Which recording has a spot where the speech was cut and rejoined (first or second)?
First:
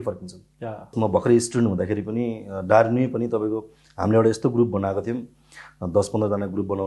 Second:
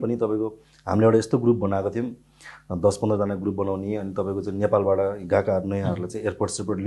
first